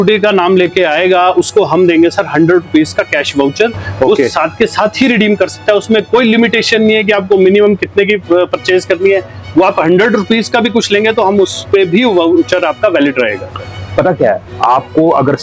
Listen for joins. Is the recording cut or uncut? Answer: uncut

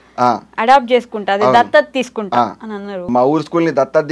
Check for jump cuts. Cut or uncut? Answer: cut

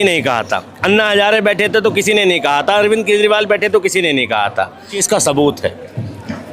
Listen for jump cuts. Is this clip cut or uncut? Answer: cut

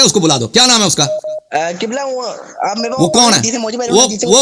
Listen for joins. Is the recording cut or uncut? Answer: cut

